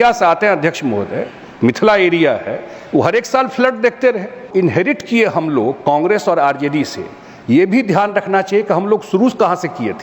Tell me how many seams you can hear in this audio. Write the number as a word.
one